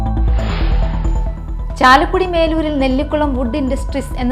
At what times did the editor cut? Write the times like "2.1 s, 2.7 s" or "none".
1.0 s